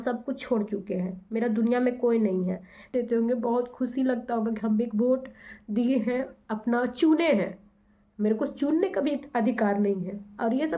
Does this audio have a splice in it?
yes; 1 cut; at 2.9 s

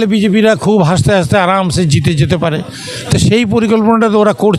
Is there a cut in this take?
no; 0 cuts

